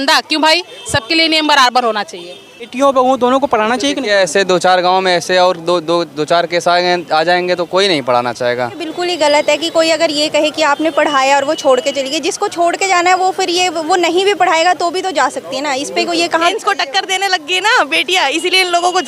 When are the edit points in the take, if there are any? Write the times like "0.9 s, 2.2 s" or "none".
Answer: 2.7 s, 8.8 s, 16.5 s